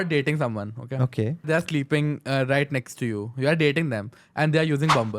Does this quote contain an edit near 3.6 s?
no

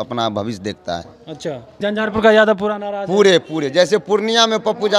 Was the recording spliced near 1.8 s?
yes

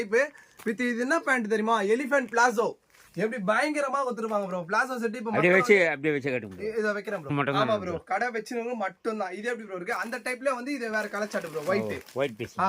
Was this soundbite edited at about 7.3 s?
yes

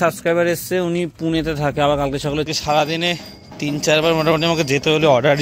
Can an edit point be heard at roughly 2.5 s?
yes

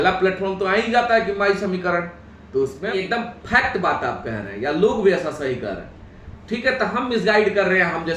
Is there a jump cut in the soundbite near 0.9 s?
no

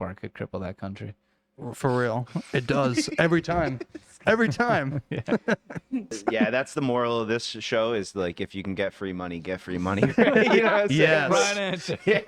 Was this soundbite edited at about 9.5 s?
no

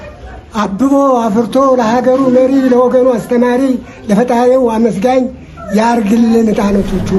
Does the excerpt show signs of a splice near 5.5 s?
no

